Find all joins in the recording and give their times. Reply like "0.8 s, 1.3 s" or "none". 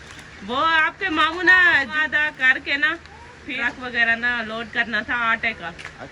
2.0 s, 3.6 s

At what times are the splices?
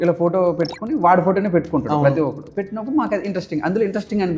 none

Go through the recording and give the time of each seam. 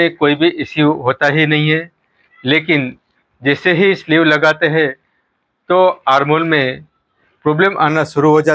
none

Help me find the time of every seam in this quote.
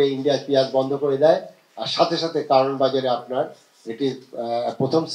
none

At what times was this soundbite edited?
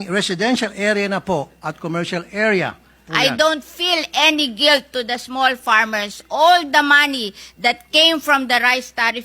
3.0 s

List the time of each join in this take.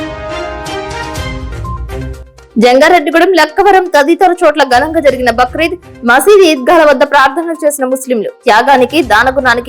2.1 s

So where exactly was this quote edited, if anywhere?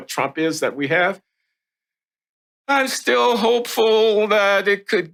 none

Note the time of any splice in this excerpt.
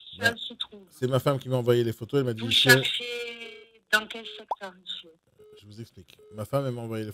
5.3 s

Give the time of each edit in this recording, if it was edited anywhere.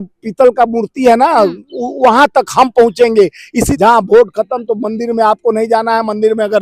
3.7 s

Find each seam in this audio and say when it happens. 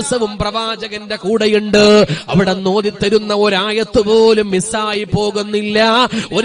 none

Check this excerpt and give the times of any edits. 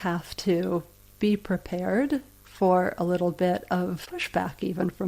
4.0 s

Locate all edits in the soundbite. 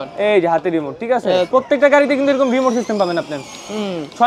1.5 s

